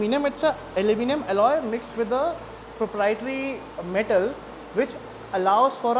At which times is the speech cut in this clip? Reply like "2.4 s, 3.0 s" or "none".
none